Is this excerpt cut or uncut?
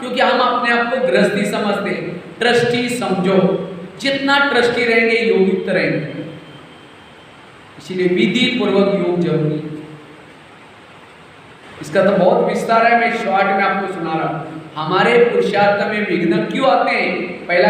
uncut